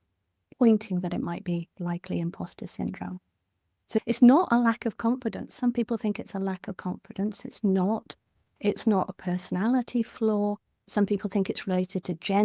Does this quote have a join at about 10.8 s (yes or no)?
yes